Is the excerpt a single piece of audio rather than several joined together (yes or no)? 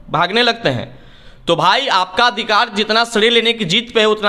yes